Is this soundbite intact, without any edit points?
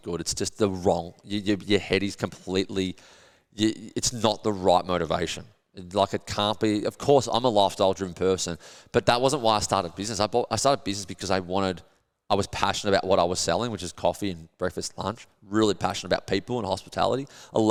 yes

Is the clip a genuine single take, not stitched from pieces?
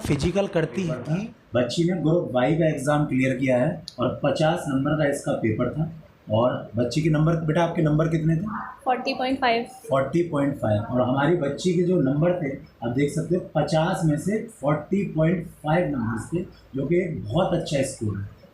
no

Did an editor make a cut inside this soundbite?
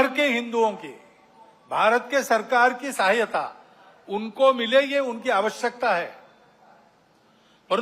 no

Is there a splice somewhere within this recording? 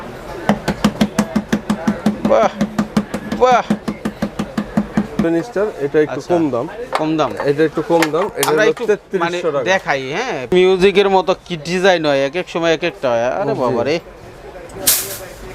yes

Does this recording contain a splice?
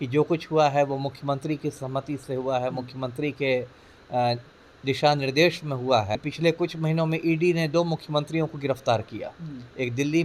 yes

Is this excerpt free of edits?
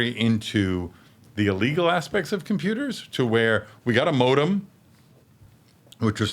yes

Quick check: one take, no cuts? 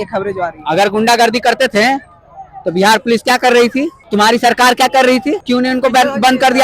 no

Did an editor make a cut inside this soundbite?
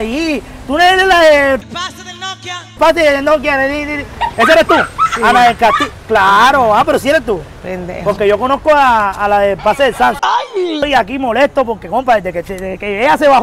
no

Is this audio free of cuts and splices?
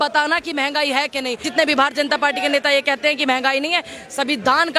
no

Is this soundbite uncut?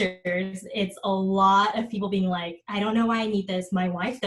no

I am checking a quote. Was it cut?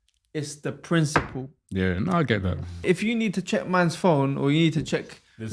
yes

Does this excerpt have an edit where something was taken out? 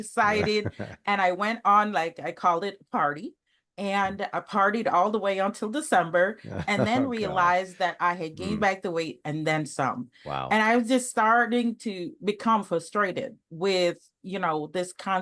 no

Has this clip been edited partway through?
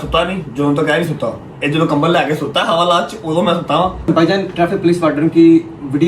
yes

